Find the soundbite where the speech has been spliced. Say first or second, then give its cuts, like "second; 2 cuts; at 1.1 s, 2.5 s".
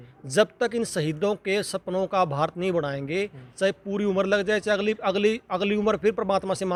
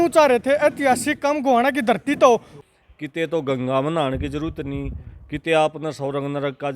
second; 1 cut; at 2.5 s